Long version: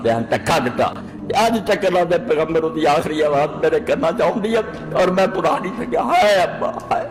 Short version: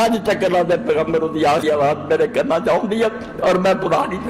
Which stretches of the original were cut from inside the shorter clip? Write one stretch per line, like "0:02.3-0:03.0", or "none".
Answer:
0:03.0-0:03.1